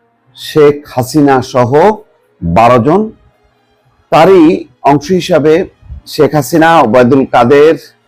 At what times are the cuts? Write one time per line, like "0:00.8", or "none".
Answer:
none